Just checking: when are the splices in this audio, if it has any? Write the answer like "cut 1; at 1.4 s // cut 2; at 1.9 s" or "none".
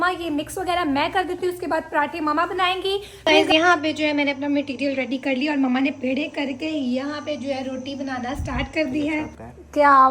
cut 1; at 3.1 s // cut 2; at 9.2 s